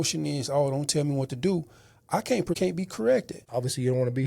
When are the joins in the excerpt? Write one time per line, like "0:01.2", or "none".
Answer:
0:02.6
0:03.4